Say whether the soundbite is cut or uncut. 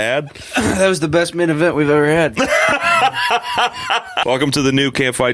cut